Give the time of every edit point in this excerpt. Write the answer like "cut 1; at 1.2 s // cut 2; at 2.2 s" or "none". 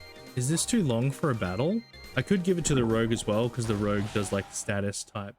cut 1; at 2.0 s